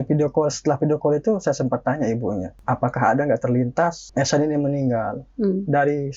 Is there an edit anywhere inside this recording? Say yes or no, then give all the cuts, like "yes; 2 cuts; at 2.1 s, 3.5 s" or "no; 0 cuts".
yes; 2 cuts; at 2.5 s, 4.0 s